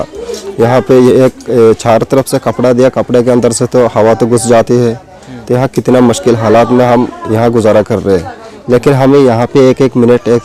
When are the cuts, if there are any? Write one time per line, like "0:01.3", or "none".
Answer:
none